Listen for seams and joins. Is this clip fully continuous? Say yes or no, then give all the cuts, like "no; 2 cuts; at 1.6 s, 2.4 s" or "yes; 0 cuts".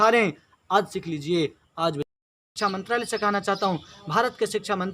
no; 1 cut; at 2.4 s